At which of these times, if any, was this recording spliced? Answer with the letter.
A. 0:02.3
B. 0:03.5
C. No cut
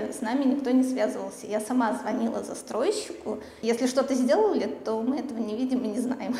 B